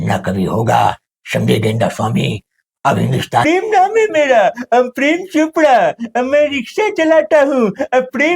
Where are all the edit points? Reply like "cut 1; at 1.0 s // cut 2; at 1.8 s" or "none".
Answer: cut 1; at 3.4 s